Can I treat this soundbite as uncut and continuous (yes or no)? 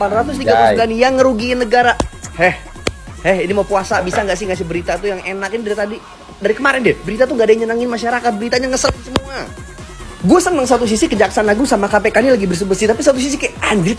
yes